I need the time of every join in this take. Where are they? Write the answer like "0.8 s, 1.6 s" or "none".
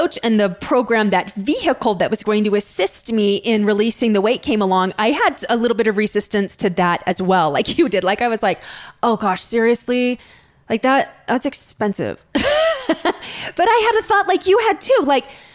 none